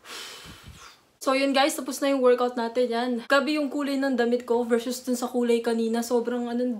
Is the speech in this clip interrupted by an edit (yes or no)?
no